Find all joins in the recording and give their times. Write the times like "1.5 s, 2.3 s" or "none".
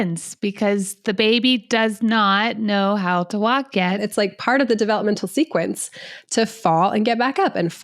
4.0 s